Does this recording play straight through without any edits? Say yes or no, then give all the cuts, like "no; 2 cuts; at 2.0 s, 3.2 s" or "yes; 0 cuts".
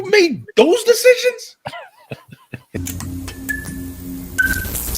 no; 1 cut; at 2.8 s